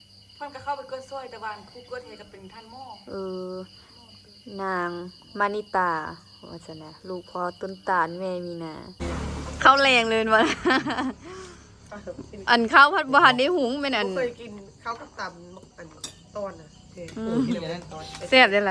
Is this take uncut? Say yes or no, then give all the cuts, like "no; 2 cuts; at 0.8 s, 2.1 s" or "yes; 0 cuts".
no; 1 cut; at 9.0 s